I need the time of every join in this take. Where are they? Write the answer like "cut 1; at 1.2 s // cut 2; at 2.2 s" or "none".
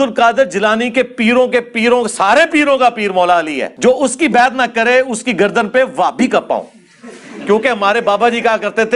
none